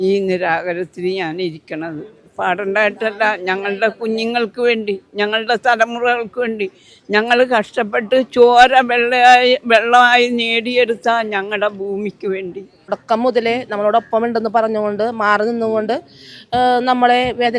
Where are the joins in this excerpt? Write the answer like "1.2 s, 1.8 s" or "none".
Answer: 12.9 s